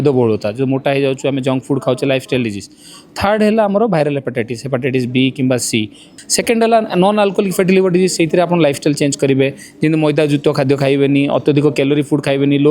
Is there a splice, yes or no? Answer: yes